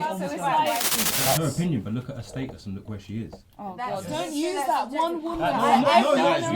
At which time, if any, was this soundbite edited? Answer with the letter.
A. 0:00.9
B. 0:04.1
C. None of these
A